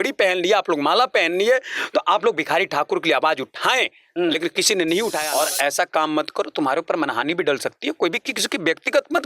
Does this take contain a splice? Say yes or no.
yes